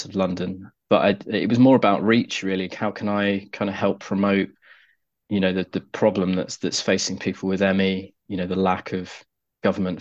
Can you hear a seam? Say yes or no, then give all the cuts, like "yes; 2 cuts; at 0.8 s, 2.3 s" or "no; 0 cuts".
no; 0 cuts